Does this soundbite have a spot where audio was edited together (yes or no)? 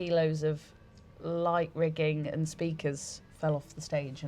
no